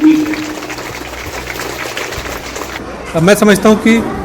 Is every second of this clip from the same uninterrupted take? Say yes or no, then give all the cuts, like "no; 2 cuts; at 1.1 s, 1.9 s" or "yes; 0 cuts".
no; 1 cut; at 2.8 s